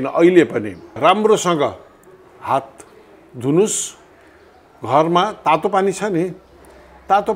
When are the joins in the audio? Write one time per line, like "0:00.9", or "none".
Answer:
0:01.0